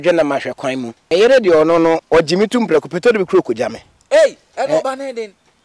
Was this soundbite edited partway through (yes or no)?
yes